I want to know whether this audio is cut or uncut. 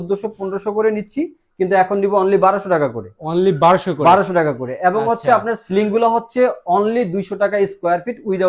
uncut